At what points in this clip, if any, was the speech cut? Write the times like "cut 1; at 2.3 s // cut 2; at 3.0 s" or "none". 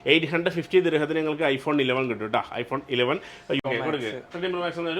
cut 1; at 3.6 s